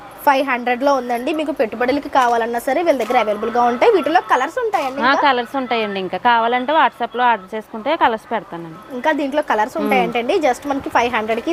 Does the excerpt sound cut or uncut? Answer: uncut